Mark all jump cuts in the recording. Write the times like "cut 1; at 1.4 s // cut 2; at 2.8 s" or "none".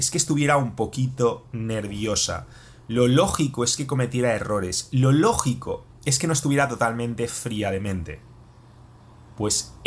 none